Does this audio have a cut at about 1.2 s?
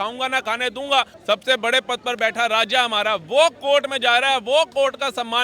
yes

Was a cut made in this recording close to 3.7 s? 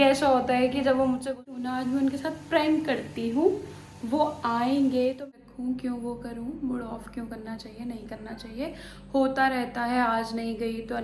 no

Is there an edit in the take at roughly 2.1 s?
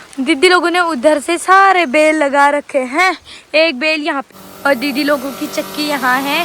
no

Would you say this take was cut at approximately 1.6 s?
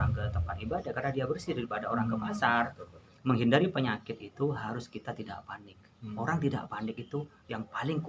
no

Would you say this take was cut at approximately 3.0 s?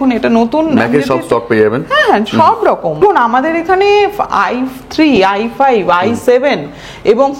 yes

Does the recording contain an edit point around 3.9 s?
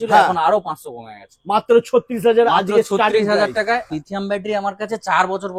yes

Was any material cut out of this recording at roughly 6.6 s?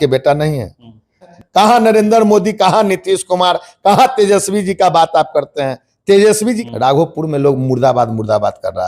yes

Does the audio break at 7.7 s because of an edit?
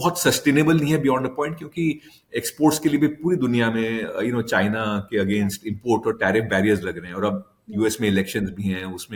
no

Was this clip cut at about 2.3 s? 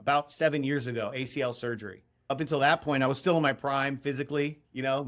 yes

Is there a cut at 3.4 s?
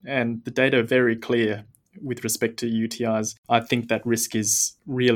no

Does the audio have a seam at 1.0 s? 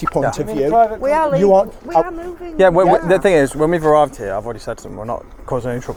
no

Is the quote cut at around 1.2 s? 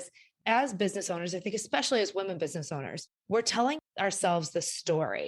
no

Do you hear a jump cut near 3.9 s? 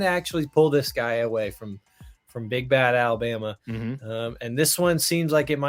no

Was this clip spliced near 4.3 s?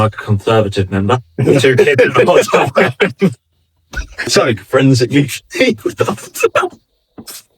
yes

